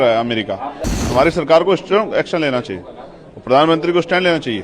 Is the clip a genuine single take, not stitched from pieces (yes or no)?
no